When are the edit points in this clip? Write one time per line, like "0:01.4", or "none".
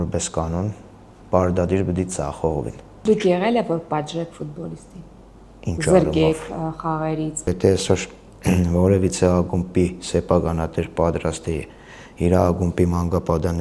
0:02.9
0:07.5